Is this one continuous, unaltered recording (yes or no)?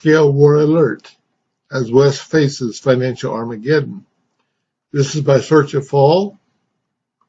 no